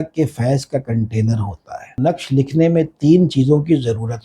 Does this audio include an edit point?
yes; 1 cut; at 1.9 s

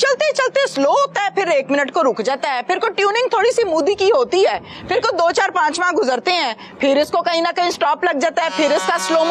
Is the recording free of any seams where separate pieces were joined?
yes; 0 cuts

